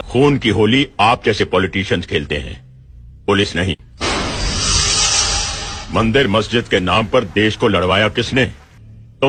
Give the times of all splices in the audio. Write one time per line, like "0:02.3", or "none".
none